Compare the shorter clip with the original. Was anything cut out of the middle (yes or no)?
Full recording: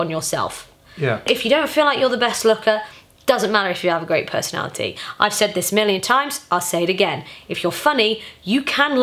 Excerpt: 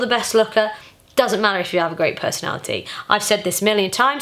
no